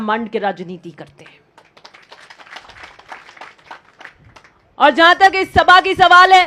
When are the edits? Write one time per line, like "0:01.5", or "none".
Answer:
none